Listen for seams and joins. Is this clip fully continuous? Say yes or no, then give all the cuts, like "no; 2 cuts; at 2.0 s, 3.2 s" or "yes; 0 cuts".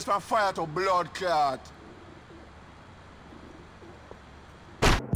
yes; 0 cuts